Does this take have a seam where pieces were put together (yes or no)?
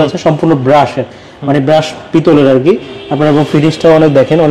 no